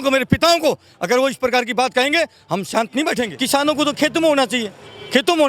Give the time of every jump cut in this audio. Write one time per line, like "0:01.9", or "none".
0:03.4